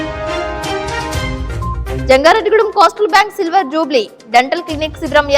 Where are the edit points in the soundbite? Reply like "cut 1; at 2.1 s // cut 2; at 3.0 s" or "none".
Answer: cut 1; at 2.0 s